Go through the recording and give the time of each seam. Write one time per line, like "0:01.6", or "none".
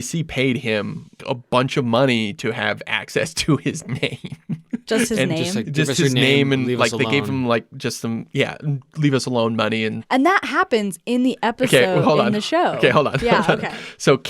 0:01.2
0:10.0